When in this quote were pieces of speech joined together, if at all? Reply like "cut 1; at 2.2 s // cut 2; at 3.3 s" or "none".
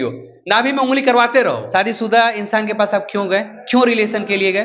cut 1; at 1.6 s